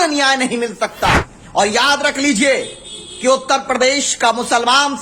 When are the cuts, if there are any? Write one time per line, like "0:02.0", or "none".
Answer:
0:01.3